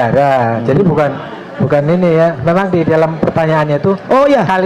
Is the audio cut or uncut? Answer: uncut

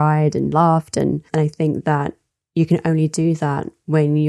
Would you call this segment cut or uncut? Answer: cut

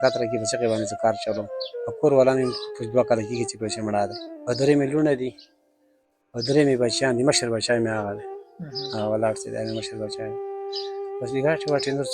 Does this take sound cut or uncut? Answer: uncut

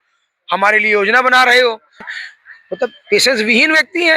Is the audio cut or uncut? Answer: cut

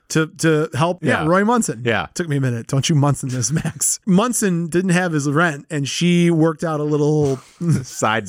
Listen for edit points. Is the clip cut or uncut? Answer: cut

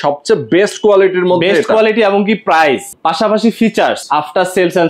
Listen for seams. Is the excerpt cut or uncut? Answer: cut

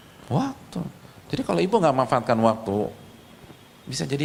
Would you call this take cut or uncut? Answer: uncut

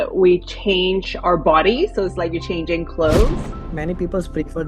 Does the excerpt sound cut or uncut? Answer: cut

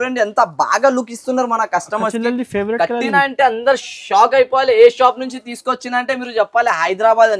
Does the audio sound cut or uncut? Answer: uncut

